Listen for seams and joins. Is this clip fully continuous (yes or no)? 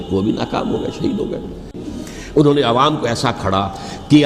no